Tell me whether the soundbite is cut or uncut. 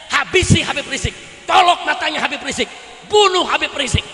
uncut